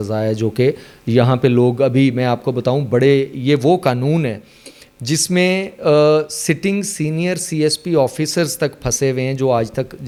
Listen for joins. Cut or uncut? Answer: uncut